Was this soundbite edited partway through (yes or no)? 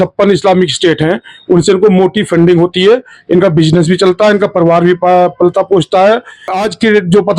yes